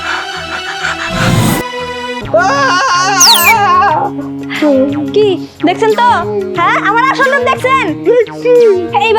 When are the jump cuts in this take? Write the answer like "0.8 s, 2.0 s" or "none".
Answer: 2.2 s